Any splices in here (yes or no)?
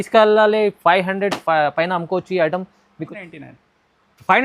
yes